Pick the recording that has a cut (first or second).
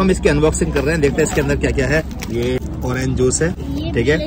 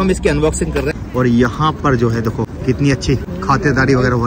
second